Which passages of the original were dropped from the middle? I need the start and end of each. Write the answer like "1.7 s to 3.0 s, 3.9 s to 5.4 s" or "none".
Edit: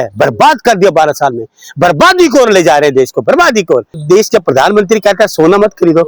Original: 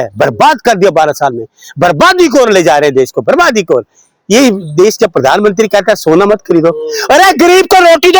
4.0 s to 4.6 s